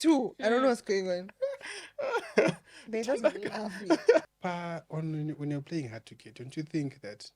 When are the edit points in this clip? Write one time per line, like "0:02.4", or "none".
0:04.3